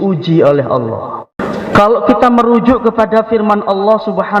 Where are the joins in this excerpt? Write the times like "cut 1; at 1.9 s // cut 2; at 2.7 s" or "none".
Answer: cut 1; at 1.4 s